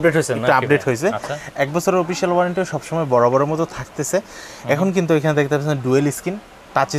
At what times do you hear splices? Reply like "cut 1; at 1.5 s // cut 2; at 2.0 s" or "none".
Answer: none